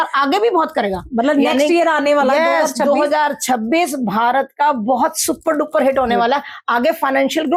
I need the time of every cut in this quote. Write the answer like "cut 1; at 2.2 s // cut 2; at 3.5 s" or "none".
none